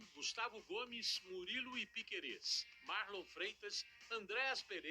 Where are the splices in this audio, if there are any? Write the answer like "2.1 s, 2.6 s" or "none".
0.9 s